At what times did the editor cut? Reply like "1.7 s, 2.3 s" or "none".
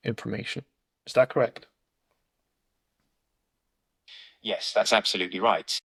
none